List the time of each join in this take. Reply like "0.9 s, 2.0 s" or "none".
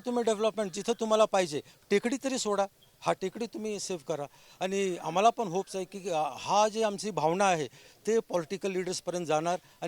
none